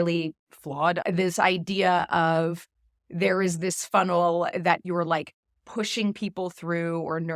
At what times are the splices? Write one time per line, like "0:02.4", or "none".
0:01.0
0:04.8